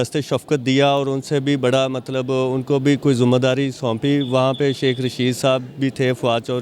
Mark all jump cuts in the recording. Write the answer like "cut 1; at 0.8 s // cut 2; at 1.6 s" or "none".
none